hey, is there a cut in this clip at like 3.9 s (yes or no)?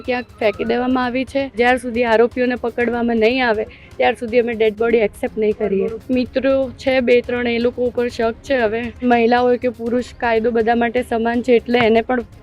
no